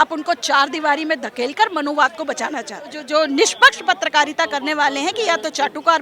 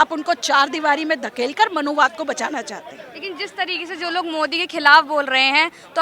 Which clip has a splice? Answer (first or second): first